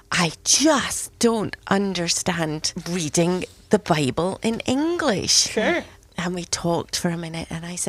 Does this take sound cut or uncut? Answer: cut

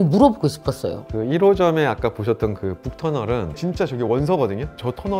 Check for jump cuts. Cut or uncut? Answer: cut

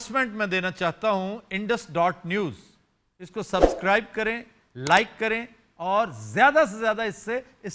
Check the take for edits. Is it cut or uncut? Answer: uncut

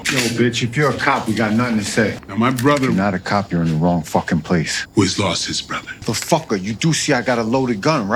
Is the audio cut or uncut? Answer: uncut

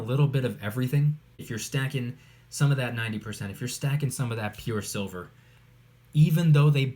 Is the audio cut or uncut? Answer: cut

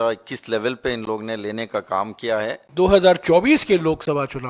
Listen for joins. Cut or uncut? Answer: cut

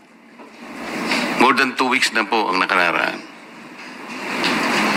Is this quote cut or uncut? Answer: uncut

